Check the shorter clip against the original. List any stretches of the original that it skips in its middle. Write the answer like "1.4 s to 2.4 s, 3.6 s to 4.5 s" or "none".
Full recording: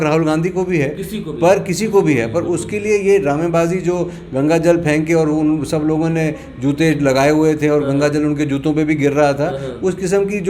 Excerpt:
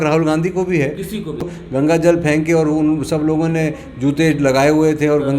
1.4 s to 4.0 s